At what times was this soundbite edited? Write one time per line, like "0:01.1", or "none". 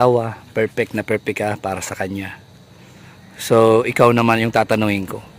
none

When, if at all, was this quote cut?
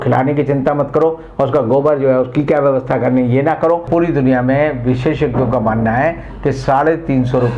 0:03.9

